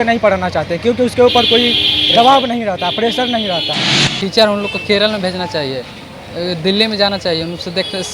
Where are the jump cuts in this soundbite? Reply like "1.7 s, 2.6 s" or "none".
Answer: 4.2 s